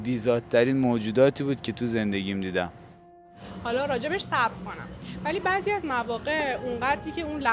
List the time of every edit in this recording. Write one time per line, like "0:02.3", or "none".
0:03.4